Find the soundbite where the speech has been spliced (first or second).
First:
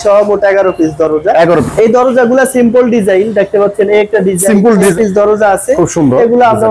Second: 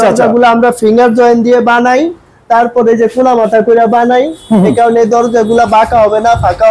first